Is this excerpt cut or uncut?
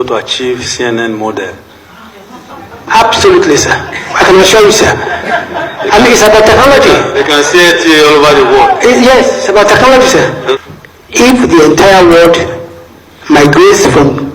cut